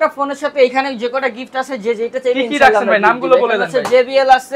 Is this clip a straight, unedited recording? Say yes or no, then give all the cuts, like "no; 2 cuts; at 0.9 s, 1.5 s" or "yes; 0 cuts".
yes; 0 cuts